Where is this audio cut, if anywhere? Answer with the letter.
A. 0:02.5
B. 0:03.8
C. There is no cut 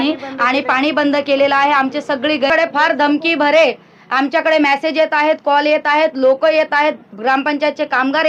A